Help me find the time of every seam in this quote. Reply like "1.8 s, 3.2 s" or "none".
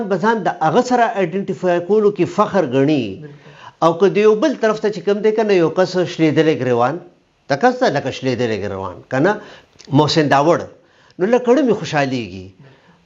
9.5 s